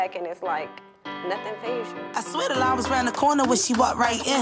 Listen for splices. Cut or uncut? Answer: cut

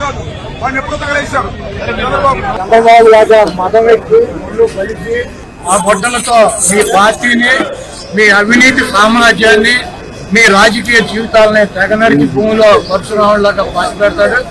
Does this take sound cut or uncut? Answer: uncut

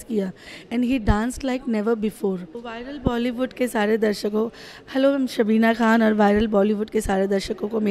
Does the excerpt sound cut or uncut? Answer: cut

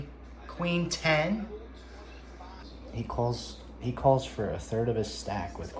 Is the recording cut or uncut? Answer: cut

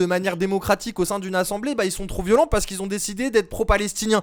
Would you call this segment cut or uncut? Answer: uncut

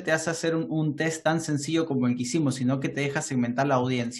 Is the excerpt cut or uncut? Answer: uncut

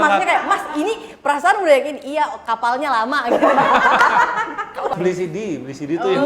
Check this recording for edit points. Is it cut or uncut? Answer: cut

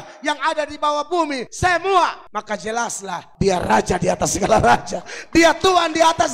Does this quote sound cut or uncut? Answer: cut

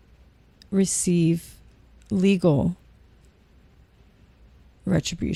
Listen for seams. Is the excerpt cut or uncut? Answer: uncut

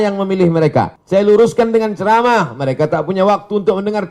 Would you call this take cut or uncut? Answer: cut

